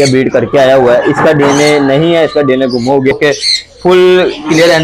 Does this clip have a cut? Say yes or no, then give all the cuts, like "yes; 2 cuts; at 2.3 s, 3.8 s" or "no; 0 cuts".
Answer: yes; 1 cut; at 3.1 s